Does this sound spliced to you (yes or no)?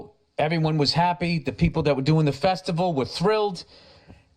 no